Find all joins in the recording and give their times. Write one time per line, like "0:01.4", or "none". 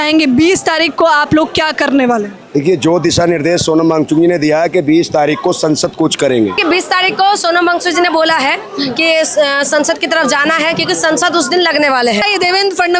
0:06.6
0:12.2